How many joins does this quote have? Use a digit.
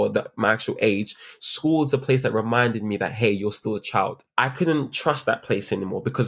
1